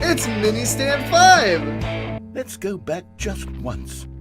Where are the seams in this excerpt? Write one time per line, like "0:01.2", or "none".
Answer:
0:02.2